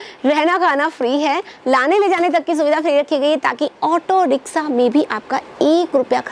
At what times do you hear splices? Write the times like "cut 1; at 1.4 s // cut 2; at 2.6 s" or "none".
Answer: none